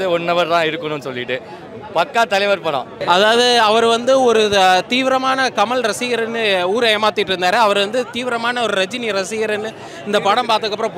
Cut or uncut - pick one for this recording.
cut